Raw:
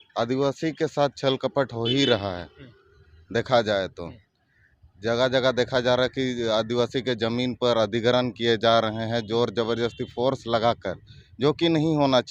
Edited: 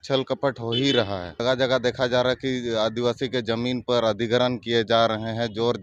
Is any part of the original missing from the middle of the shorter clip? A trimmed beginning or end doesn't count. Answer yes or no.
yes